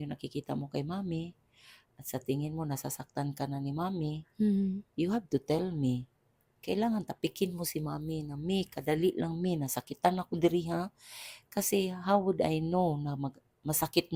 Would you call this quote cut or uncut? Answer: uncut